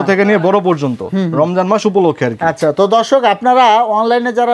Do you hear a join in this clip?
no; 0 cuts

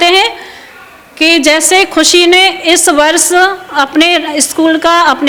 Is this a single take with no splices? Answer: yes; 0 cuts

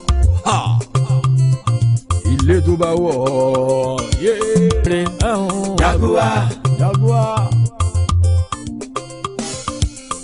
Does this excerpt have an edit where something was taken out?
yes; 1 cut; at 4.9 s

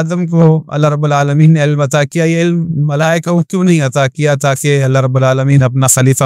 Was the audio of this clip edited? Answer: no; 0 cuts

